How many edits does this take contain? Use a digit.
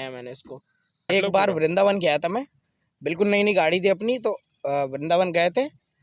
1